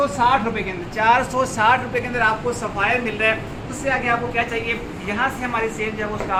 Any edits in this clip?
no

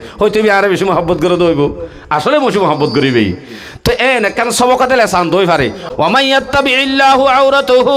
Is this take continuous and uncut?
no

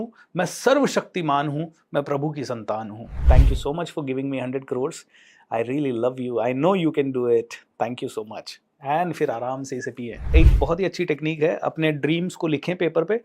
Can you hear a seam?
yes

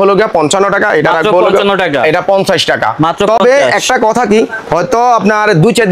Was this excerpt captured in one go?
yes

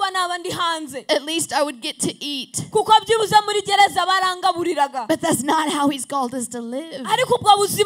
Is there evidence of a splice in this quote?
no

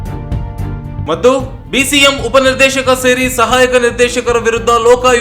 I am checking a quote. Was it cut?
yes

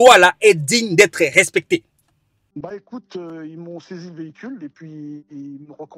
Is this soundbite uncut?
no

